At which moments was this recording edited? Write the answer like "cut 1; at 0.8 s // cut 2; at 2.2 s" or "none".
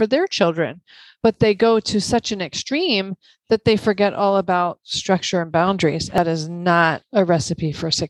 cut 1; at 6.2 s